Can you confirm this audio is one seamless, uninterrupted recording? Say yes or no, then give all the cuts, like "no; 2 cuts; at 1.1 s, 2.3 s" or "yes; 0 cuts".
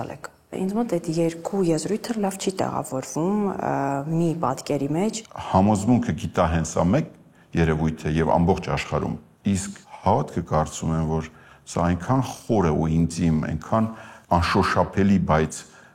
no; 2 cuts; at 5.3 s, 14.1 s